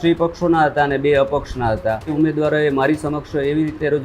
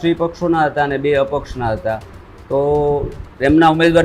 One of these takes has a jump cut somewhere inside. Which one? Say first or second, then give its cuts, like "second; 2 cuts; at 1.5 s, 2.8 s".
first; 1 cut; at 2.1 s